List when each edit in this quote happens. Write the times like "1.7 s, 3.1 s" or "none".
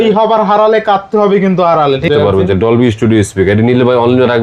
2.1 s